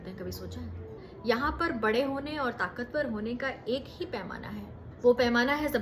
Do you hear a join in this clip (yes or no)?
yes